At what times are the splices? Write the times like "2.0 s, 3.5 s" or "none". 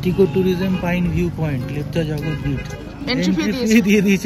none